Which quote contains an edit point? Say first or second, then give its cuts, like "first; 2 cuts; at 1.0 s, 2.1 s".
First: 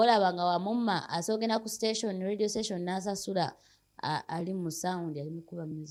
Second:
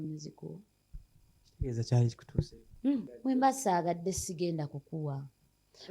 second; 1 cut; at 3.1 s